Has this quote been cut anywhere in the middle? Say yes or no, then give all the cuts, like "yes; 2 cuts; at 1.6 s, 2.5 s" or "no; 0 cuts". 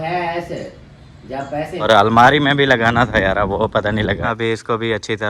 yes; 2 cuts; at 1.9 s, 4.3 s